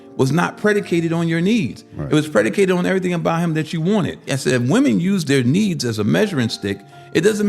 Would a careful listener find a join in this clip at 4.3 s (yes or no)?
yes